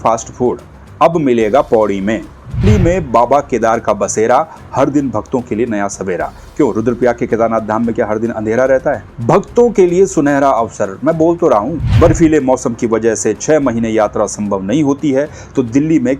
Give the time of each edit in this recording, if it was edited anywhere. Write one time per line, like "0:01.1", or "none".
0:02.6
0:11.8